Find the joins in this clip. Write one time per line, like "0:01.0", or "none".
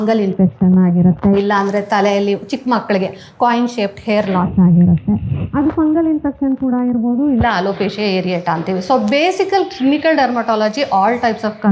none